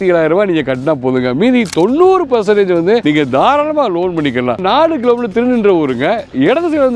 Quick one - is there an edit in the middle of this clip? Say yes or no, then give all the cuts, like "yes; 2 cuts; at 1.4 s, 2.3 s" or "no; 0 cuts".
yes; 2 cuts; at 3.0 s, 4.6 s